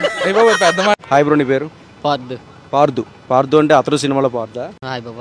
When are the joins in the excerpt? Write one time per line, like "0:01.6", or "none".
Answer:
0:00.9